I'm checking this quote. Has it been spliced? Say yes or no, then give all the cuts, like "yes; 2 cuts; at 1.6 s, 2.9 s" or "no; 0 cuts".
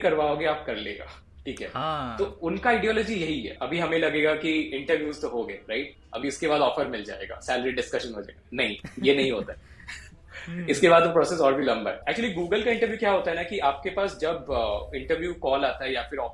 yes; 2 cuts; at 3.6 s, 12.0 s